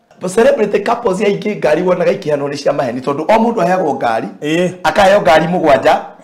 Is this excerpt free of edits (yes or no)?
yes